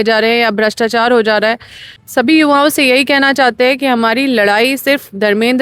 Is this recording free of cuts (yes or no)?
no